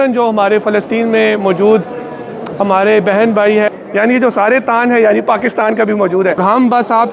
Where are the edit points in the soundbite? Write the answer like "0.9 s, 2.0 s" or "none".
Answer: 3.7 s, 6.4 s